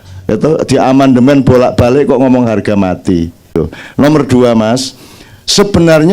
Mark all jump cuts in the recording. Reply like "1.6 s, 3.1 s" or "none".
3.5 s